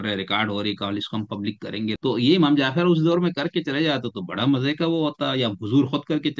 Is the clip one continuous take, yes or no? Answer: no